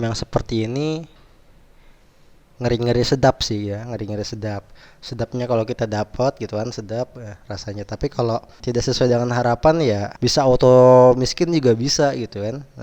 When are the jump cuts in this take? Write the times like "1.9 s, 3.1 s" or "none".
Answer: 8.5 s, 10.1 s